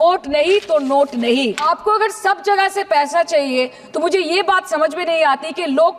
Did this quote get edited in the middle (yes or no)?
yes